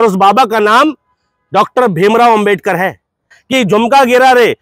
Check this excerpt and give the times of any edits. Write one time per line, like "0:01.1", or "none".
0:03.4